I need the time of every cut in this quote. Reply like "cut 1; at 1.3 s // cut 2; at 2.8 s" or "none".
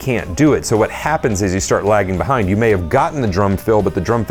none